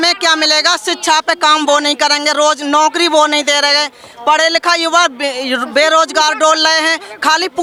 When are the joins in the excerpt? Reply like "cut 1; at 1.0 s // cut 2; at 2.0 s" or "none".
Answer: none